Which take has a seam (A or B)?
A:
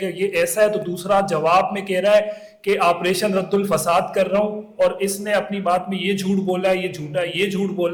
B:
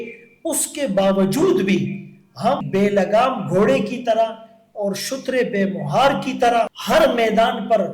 B